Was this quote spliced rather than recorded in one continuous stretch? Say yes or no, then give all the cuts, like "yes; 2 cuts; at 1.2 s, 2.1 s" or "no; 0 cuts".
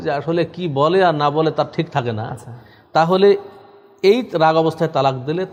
no; 0 cuts